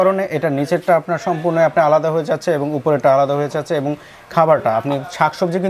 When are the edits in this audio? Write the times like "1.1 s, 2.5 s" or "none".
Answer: none